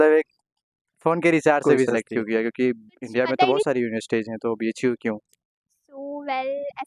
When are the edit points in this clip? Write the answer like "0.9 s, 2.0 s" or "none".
1.9 s